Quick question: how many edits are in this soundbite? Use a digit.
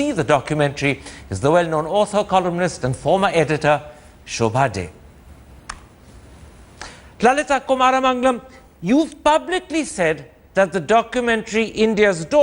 1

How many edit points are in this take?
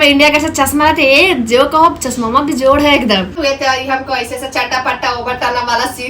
1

